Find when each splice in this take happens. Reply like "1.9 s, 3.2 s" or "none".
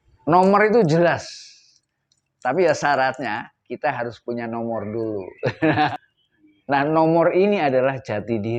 5.9 s